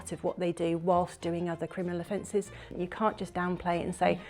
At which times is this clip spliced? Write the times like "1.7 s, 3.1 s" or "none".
2.7 s